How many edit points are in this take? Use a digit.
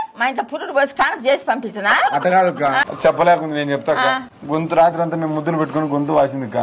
2